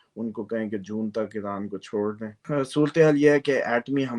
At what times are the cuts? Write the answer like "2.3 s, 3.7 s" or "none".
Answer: 2.3 s

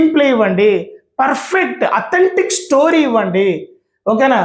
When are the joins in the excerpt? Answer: none

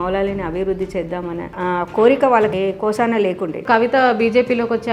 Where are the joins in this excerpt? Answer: 2.5 s, 3.6 s

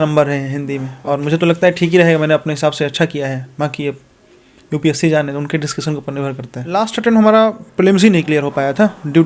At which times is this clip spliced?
6.6 s

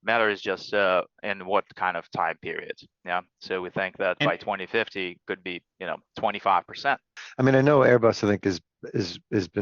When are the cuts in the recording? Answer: 7.2 s

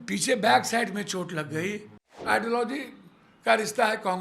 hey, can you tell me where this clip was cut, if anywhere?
2.2 s

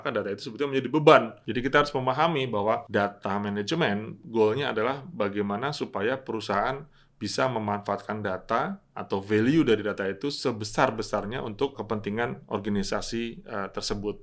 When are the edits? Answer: 1.4 s, 2.8 s, 11.8 s

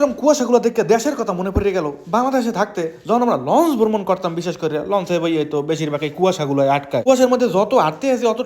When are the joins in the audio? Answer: 7.0 s

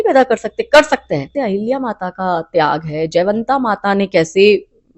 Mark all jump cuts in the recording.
1.3 s

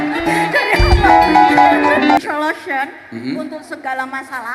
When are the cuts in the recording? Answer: 2.2 s

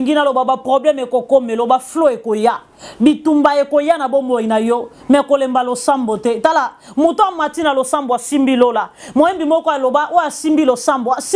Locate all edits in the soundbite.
none

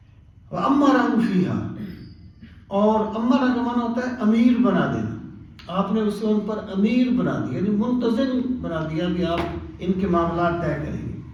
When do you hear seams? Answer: none

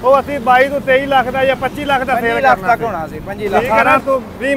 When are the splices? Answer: 3.7 s

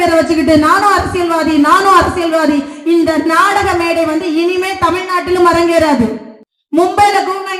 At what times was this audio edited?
none

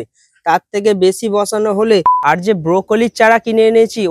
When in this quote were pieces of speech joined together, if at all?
2.1 s

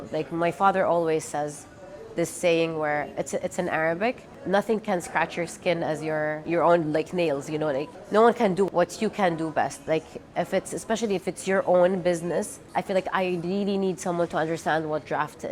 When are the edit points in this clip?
4.4 s, 6.4 s, 7.9 s, 8.7 s, 12.6 s

